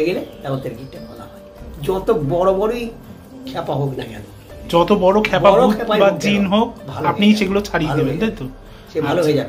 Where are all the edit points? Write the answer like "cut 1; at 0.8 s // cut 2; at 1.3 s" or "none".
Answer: none